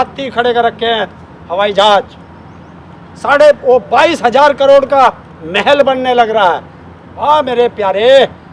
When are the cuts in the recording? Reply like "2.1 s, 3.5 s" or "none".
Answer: none